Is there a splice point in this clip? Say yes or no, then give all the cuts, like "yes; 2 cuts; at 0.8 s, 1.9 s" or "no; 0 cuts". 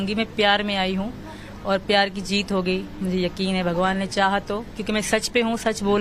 no; 0 cuts